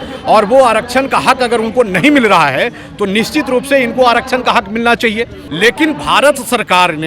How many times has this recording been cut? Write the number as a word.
one